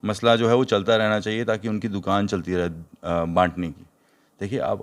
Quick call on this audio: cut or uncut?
uncut